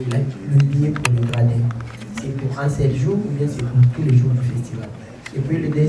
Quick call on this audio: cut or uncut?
uncut